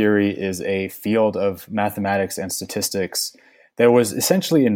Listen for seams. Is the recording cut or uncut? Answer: uncut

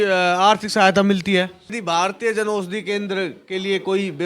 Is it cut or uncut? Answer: cut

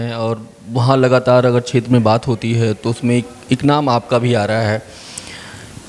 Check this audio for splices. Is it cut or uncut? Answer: uncut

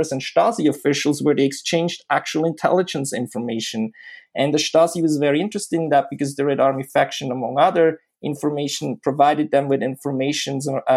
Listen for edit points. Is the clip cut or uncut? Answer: uncut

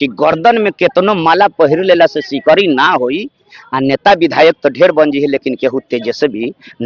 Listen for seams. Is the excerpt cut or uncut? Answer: uncut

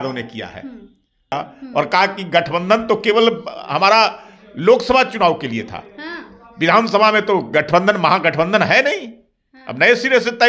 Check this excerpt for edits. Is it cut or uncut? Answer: cut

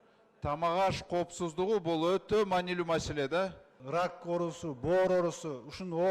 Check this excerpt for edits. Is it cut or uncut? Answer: cut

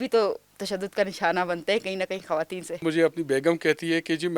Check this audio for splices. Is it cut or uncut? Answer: cut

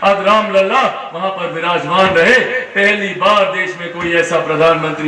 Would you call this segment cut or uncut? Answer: uncut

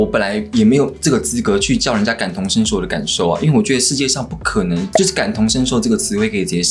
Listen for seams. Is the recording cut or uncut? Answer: uncut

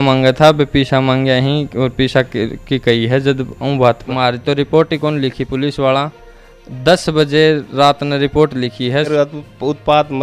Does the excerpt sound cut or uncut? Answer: cut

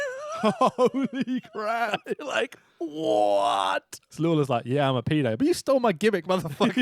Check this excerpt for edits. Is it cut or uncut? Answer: cut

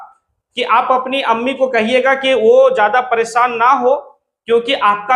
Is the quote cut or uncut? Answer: uncut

